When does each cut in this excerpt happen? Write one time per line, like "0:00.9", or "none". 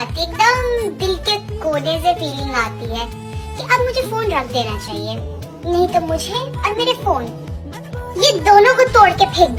none